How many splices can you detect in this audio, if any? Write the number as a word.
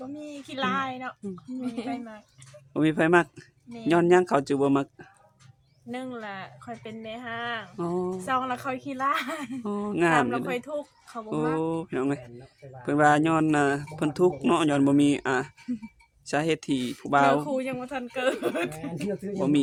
zero